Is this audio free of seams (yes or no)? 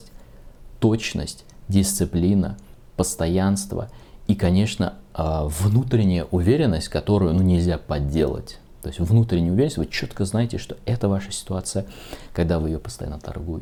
yes